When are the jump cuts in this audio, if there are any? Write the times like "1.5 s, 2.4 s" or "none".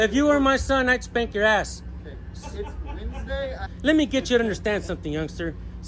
3.7 s